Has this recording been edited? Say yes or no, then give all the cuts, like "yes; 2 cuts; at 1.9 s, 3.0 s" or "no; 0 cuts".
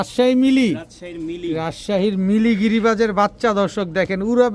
no; 0 cuts